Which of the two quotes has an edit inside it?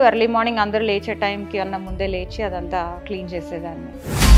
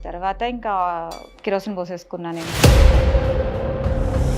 second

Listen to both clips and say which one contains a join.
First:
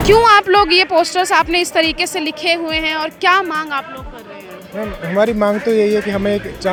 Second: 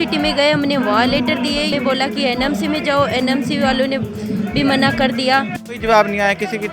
second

